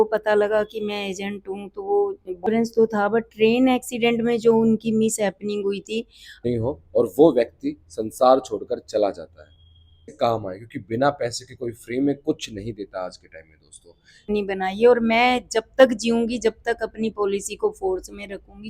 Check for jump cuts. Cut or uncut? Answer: cut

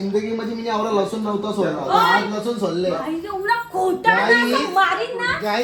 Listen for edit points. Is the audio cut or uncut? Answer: uncut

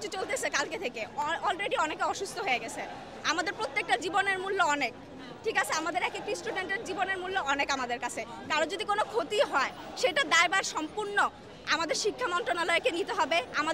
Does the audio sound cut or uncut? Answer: uncut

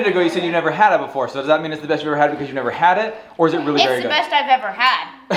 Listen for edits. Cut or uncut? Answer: uncut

